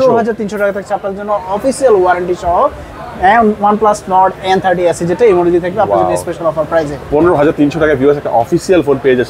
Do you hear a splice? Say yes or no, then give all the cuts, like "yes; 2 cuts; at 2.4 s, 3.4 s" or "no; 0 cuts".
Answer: no; 0 cuts